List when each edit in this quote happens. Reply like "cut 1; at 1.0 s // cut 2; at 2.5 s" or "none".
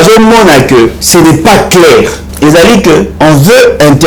cut 1; at 1.0 s // cut 2; at 2.2 s // cut 3; at 3.1 s